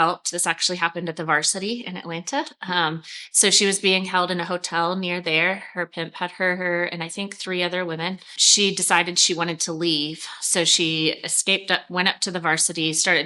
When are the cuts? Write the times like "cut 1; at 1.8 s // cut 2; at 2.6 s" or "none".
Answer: cut 1; at 8.4 s